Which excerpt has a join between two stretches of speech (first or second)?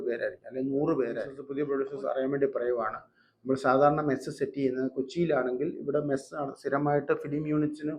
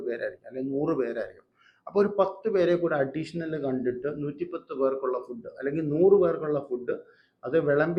first